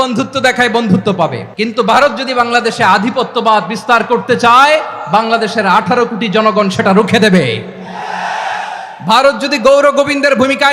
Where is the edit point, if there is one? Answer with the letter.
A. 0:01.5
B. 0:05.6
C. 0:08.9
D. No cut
A